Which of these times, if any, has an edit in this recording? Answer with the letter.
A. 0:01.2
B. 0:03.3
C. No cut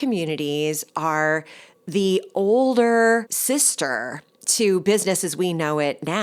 B